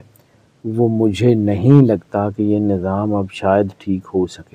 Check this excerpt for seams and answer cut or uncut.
uncut